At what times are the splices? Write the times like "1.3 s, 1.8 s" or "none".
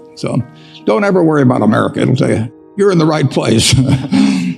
2.7 s